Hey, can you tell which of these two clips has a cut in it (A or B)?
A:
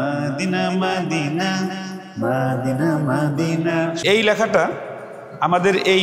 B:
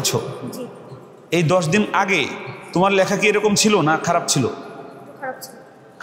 A